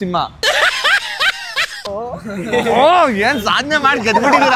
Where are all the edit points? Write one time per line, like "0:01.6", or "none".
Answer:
0:01.9